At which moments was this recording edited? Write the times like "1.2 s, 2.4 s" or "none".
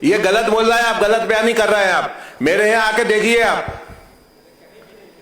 none